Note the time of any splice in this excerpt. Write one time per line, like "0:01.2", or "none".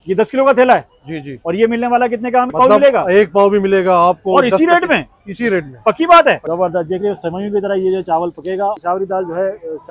0:02.5
0:06.4
0:08.8